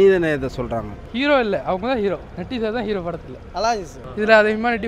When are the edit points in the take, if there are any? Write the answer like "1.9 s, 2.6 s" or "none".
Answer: 1.0 s, 4.0 s